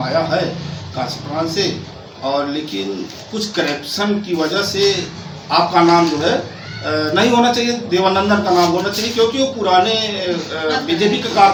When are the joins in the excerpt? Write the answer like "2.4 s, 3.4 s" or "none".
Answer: none

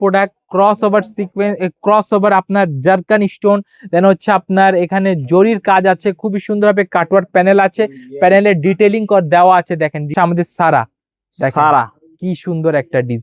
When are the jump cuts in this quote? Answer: 10.1 s

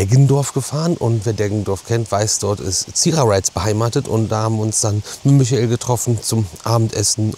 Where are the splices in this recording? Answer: none

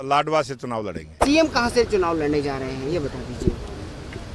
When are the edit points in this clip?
1.1 s

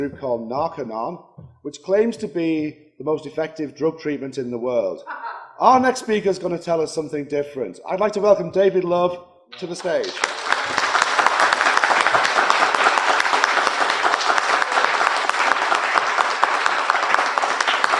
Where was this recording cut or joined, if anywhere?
15.2 s

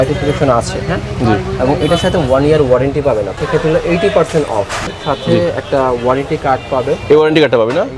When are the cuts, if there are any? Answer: 3.4 s, 4.9 s

